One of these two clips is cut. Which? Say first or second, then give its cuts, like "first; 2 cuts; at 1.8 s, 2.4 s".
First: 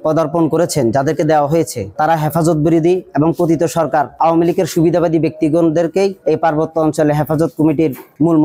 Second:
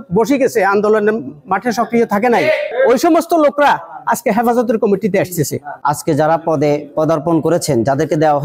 second; 2 cuts; at 2.7 s, 5.8 s